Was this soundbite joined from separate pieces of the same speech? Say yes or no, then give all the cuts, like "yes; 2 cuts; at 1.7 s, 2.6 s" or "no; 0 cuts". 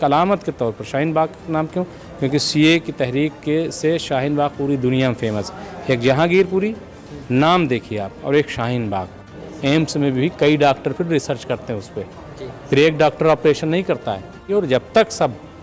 yes; 2 cuts; at 9.5 s, 14.5 s